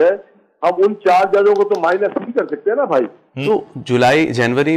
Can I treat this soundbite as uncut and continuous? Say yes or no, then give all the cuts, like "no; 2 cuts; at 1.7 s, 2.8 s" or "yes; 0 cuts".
no; 1 cut; at 3.3 s